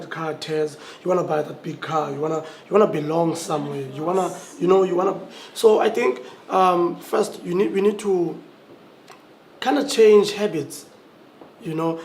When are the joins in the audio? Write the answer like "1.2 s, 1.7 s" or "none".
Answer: 1.0 s